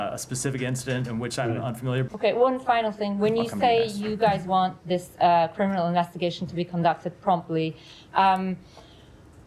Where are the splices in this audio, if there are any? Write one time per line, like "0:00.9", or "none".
0:02.1